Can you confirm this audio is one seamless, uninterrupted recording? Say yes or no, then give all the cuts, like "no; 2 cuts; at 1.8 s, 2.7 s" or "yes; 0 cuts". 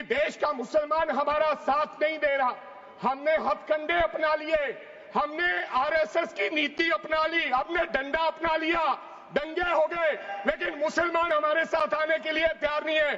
yes; 0 cuts